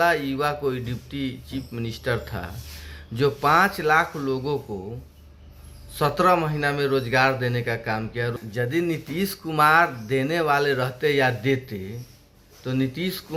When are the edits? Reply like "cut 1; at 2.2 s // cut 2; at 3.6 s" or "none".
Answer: cut 1; at 8.4 s